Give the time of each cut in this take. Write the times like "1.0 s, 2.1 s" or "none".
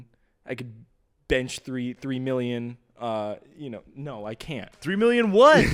none